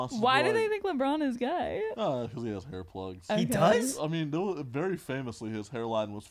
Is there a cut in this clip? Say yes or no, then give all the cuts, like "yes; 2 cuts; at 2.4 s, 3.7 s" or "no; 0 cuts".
yes; 3 cuts; at 1.9 s, 3.2 s, 3.9 s